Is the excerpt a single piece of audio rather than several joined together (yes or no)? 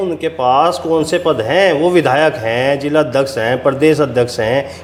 yes